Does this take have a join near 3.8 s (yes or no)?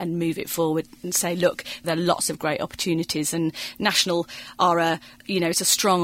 no